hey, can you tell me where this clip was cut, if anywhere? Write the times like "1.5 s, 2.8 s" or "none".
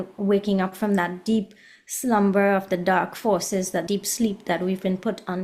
3.9 s